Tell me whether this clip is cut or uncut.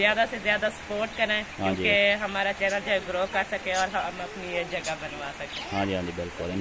uncut